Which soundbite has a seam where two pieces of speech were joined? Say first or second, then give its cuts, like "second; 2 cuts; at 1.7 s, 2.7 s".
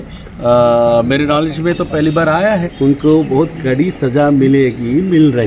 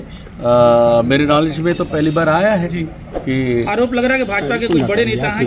first; 1 cut; at 2.7 s